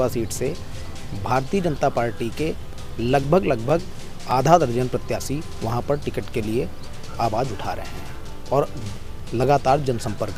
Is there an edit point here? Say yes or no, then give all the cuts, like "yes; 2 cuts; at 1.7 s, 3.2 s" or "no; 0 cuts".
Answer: no; 0 cuts